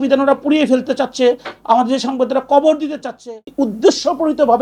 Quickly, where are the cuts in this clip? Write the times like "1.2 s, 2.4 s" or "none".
3.2 s